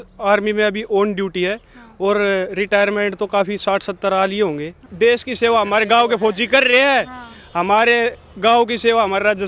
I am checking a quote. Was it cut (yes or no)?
yes